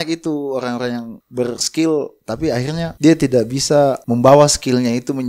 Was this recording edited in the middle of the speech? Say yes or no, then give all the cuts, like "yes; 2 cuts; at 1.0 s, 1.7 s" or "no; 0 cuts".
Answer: yes; 3 cuts; at 1.2 s, 2.9 s, 4.0 s